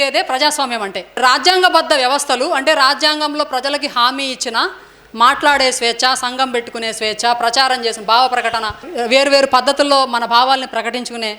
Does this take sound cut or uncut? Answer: cut